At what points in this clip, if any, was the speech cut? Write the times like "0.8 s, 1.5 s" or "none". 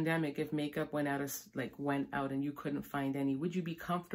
none